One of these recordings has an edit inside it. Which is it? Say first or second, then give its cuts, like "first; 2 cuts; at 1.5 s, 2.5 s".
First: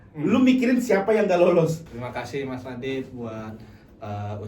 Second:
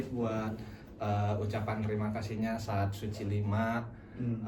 first; 1 cut; at 1.9 s